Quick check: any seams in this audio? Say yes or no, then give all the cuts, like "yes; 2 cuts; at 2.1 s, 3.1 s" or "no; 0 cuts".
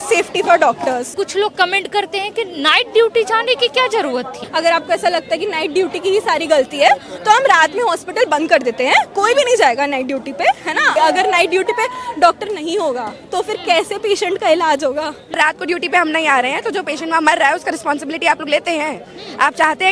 yes; 4 cuts; at 1.2 s, 4.4 s, 10.9 s, 15.2 s